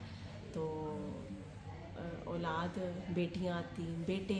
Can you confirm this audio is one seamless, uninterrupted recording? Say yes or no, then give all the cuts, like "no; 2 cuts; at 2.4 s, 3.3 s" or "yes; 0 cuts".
yes; 0 cuts